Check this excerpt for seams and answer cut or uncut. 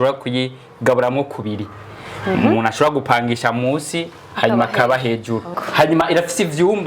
cut